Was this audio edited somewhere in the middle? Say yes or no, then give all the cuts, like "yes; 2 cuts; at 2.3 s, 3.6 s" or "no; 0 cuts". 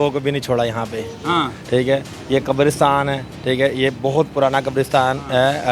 no; 0 cuts